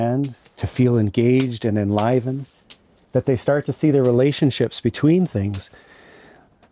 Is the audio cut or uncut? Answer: uncut